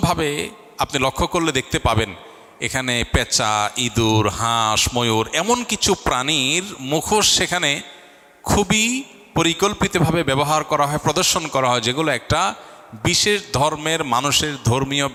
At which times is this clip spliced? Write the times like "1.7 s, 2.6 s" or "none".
none